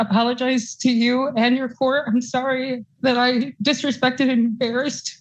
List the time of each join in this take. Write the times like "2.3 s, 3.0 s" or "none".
none

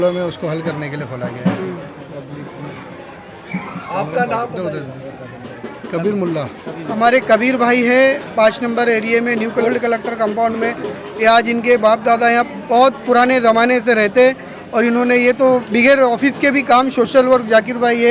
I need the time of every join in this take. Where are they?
6.9 s, 9.6 s

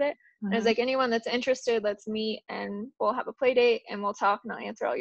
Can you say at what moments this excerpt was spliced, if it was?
none

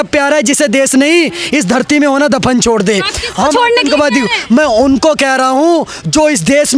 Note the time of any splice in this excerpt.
none

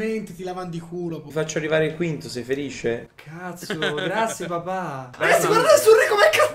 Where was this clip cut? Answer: 1.2 s, 5.1 s

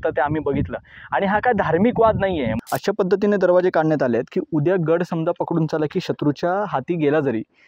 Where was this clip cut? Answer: 2.6 s

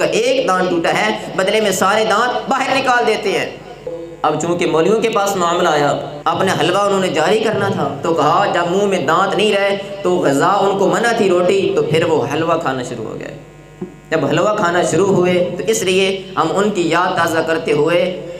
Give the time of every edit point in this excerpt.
4.0 s, 6.1 s

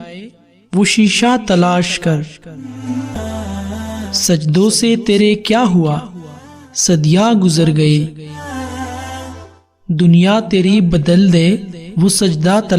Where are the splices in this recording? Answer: 3.1 s

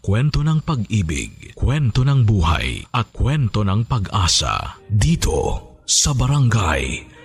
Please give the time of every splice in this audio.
none

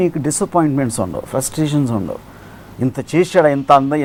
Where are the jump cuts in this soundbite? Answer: none

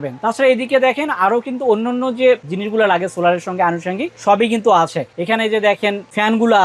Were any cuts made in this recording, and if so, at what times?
none

